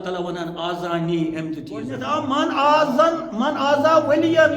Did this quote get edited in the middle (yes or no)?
yes